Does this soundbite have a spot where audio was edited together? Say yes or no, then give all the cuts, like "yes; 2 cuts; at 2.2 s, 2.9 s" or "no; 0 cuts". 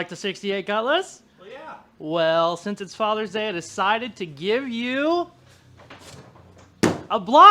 no; 0 cuts